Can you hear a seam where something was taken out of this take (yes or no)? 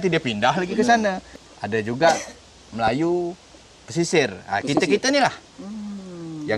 yes